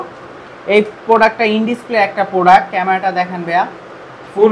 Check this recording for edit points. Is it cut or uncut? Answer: uncut